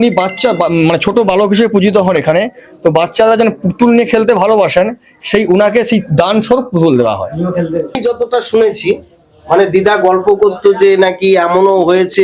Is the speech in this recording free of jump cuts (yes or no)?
no